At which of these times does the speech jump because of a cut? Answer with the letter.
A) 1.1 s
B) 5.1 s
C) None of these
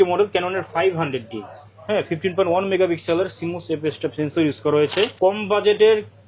B